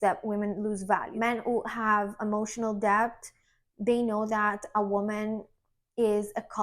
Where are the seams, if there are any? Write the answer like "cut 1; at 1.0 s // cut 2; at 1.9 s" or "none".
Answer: cut 1; at 1.1 s